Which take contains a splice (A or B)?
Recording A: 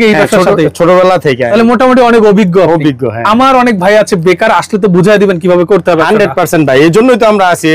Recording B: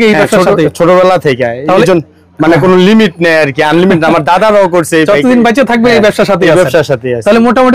A